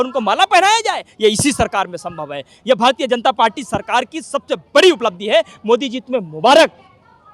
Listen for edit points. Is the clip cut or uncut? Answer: uncut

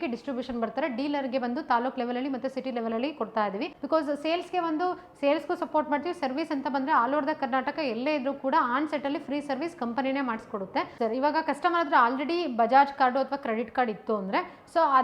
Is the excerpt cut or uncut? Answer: cut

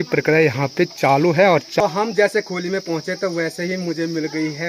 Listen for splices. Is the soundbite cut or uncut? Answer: cut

